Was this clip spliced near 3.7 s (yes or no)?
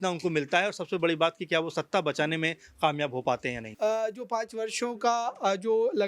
yes